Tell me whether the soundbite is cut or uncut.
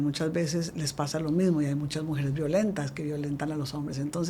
uncut